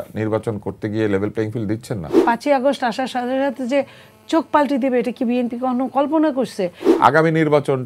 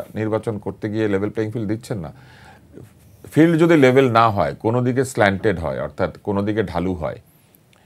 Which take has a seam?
first; 2 cuts; at 2.2 s, 6.8 s

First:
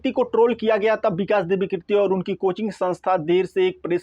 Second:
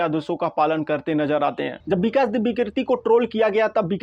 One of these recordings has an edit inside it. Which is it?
second; 1 cut; at 1.7 s

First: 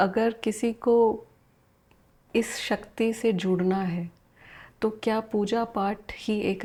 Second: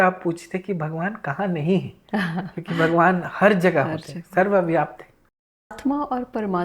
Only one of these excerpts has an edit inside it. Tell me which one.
second; 1 cut; at 5.8 s

